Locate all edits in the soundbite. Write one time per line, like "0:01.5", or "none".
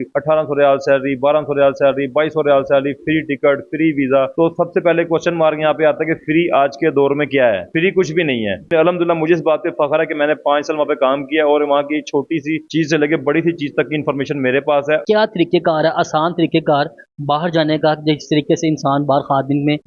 0:08.7
0:15.0

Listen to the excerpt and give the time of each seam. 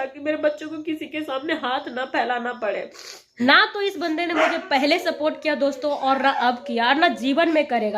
0:03.4

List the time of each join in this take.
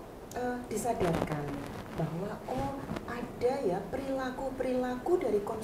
none

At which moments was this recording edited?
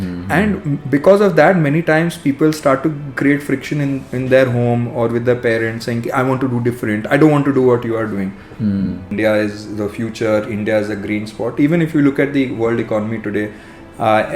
0:09.1

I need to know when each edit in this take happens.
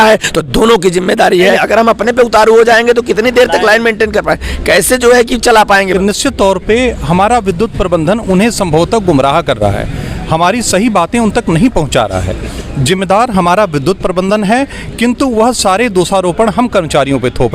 0:01.6
0:05.9

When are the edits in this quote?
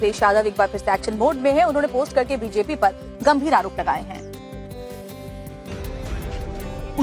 0:01.4

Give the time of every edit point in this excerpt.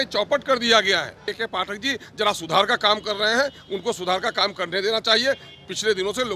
0:01.3

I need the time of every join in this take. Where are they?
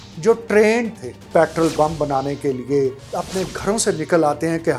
0:01.1
0:03.1

